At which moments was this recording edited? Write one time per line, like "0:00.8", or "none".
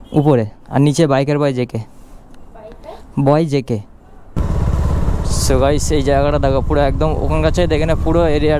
0:04.4